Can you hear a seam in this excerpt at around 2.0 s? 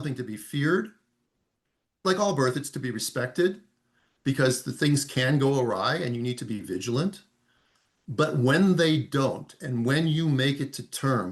yes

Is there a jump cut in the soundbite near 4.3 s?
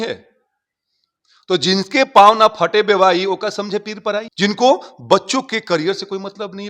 yes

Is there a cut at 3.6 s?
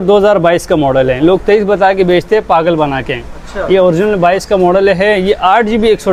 no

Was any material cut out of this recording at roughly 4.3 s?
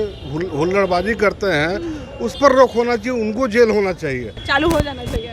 yes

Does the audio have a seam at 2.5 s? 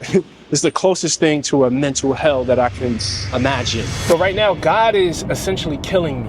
no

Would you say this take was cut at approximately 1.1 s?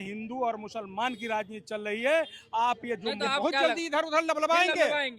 no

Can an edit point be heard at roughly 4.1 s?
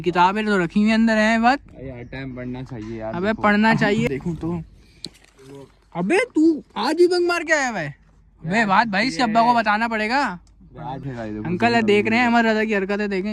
yes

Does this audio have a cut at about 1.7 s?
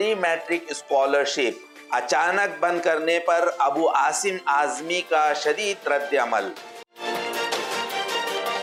no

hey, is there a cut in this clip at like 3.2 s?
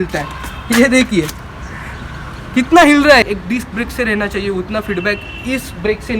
yes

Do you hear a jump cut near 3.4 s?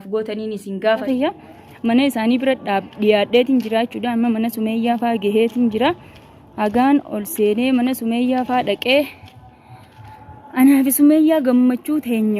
no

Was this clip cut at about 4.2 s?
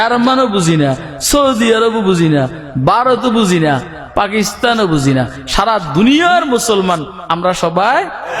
no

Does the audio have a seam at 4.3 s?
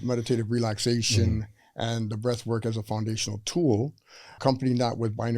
yes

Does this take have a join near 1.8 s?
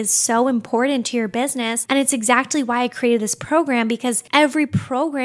no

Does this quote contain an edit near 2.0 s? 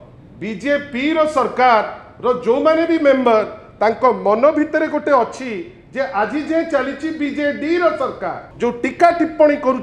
no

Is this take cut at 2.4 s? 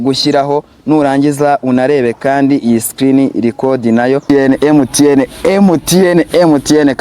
no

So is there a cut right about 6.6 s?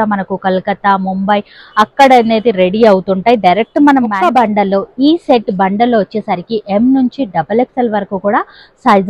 no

